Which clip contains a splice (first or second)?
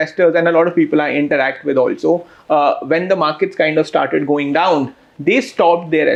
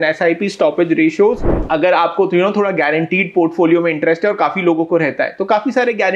second